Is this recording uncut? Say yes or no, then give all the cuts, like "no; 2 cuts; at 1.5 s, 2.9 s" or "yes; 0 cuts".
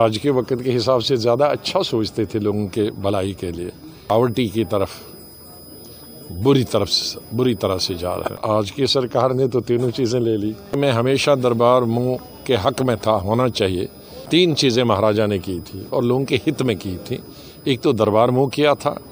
no; 4 cuts; at 4.1 s, 8.4 s, 10.8 s, 14.3 s